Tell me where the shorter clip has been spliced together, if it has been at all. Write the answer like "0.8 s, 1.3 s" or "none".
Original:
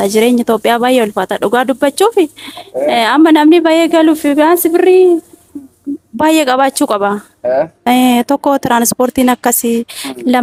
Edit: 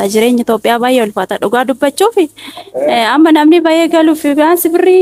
none